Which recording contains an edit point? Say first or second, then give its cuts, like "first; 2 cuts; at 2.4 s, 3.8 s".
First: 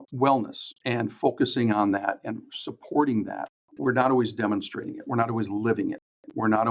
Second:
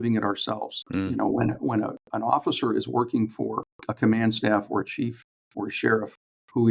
first; 1 cut; at 3.6 s